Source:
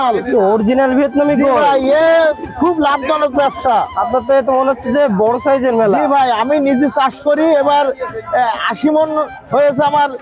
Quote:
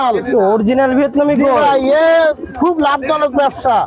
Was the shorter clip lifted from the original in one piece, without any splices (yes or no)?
yes